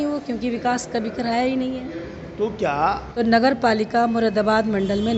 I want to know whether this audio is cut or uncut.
cut